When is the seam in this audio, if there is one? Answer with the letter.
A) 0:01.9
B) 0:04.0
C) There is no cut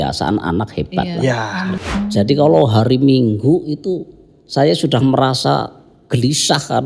A